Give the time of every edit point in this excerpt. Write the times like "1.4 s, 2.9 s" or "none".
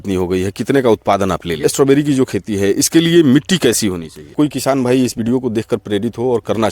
1.6 s, 4.3 s